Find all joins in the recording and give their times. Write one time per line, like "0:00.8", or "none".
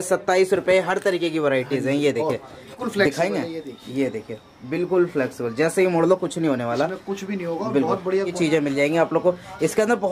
0:02.8
0:08.3